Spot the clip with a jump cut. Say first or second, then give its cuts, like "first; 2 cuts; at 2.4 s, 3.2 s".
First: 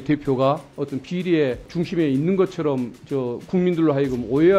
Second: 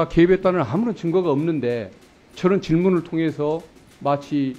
first; 2 cuts; at 1.7 s, 3.0 s